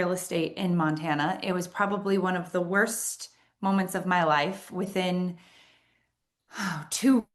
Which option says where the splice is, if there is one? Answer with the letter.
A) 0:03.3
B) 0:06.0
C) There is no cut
C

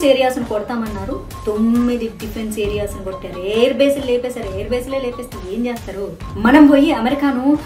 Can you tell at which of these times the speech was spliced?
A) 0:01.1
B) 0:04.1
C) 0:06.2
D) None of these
C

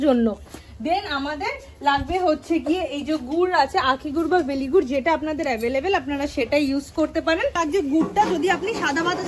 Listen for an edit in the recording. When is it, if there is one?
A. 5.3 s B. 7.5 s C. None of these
B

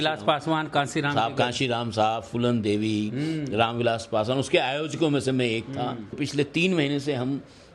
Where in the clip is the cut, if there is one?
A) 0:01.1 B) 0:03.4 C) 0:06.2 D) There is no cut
C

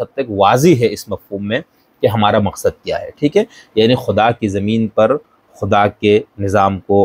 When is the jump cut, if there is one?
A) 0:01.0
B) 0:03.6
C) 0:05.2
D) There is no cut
D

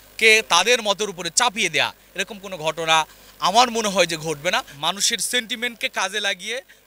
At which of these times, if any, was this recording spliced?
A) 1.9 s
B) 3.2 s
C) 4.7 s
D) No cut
C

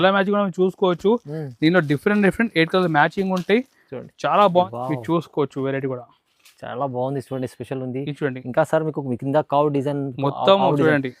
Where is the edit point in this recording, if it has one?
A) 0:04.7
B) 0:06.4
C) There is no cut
A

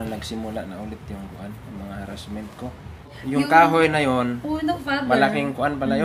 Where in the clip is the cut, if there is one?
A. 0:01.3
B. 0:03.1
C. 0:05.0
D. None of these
B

